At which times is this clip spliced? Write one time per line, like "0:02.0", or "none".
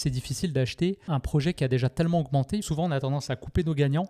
0:01.0
0:02.7